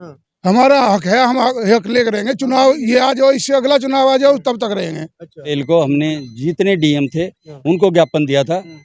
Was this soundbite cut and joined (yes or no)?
yes